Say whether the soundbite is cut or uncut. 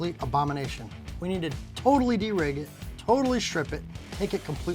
uncut